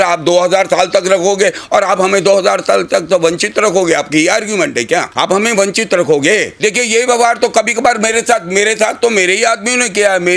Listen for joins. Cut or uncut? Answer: cut